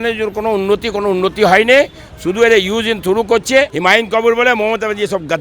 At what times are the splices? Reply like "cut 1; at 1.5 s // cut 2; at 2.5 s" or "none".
cut 1; at 3.7 s